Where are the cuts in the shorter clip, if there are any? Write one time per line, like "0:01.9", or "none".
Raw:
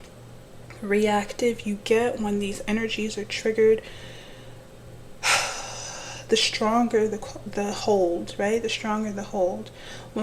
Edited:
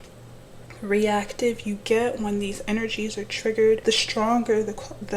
0:03.8

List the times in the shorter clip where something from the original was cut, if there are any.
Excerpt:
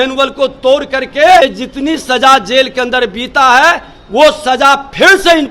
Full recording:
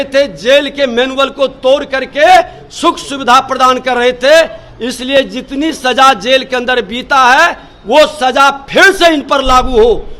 0:01.4

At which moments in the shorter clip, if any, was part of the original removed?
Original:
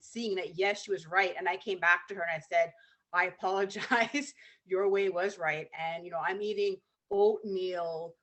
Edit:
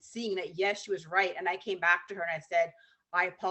none

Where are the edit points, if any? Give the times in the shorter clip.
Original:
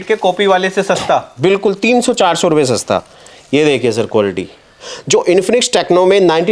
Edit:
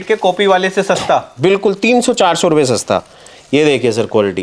none

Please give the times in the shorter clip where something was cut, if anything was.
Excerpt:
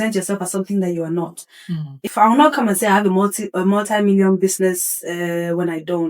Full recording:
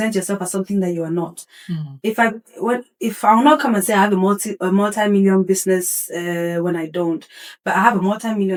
0:02.0

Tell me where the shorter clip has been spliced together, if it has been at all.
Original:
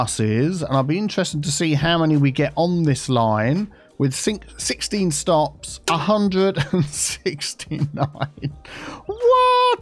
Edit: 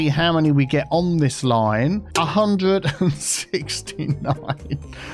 0:02.1

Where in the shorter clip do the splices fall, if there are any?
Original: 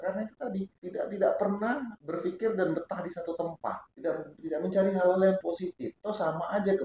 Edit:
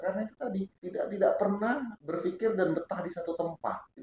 none

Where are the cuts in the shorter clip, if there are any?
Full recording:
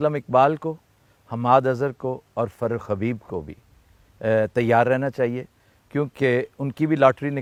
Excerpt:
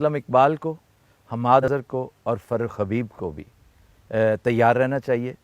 0:01.6

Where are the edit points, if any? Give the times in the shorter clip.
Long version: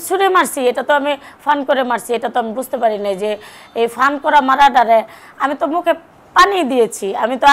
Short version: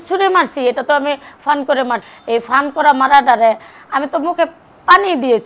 0:02.0

